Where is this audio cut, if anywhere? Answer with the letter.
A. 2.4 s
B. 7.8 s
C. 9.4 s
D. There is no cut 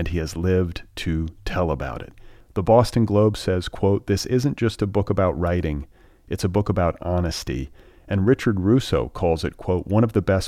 D